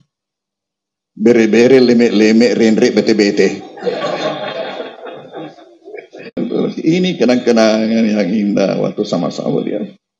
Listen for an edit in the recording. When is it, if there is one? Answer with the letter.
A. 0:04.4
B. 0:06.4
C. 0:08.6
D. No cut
B